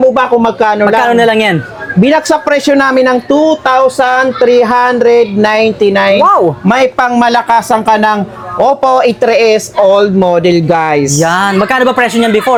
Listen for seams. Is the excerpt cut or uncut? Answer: uncut